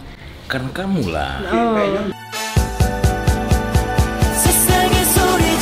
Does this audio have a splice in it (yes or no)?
no